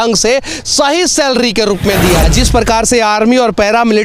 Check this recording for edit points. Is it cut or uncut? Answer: cut